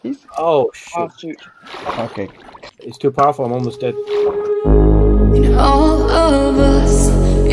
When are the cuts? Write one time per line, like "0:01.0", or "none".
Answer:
0:02.5
0:04.0